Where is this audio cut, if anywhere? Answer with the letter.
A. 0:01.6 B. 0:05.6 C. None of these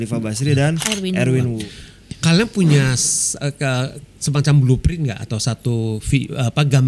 A